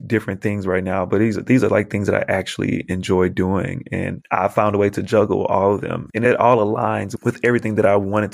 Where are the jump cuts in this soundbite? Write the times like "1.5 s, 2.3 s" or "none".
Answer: 6.0 s, 7.1 s